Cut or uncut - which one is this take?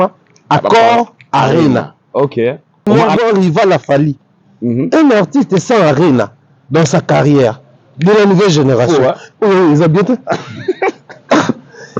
cut